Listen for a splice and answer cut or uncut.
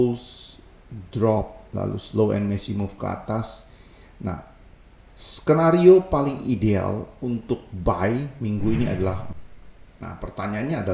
cut